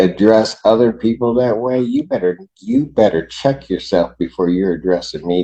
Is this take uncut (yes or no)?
yes